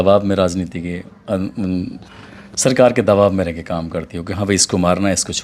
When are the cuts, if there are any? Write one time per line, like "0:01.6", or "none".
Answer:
none